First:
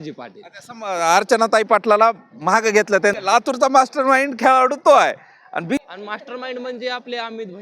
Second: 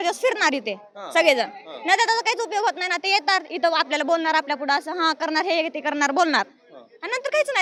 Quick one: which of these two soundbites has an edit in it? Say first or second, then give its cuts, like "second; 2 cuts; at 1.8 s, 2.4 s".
first; 2 cuts; at 3.2 s, 5.8 s